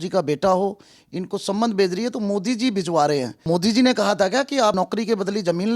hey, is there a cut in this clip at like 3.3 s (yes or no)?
yes